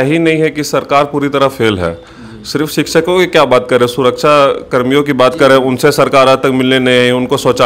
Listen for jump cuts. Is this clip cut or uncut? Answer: uncut